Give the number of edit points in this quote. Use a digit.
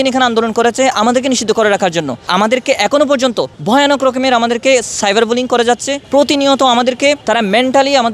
4